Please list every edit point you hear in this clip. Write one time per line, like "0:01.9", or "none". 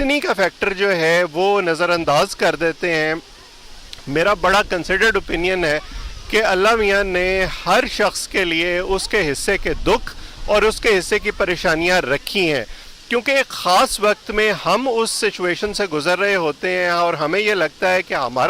none